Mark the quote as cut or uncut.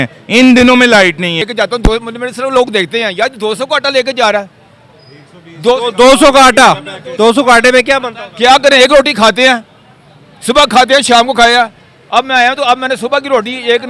cut